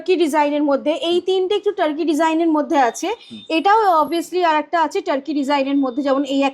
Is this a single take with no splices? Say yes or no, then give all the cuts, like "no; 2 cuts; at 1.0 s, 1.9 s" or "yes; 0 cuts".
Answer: yes; 0 cuts